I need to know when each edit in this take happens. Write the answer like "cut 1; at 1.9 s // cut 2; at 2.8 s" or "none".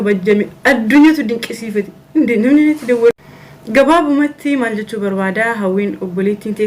cut 1; at 3.1 s